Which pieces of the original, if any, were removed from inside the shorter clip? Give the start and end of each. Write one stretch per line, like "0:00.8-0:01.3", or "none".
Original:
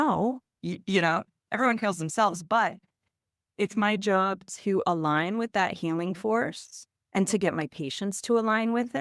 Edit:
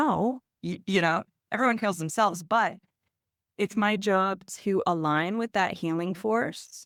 none